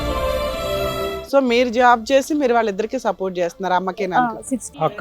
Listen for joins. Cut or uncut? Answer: cut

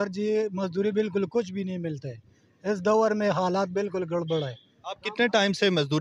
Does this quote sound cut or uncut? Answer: uncut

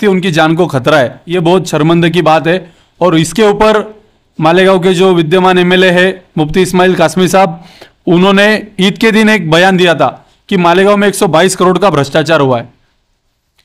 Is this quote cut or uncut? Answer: cut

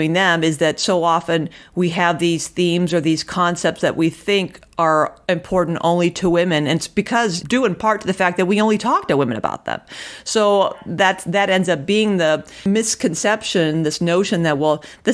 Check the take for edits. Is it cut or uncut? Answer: cut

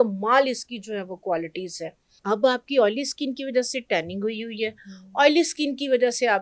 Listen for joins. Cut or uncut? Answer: cut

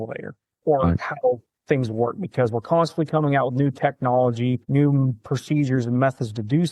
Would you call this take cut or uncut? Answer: cut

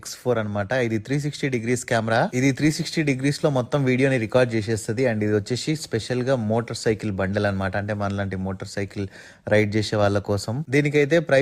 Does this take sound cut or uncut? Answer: uncut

